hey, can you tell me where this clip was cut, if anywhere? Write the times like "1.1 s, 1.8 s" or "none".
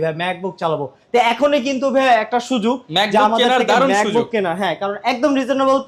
none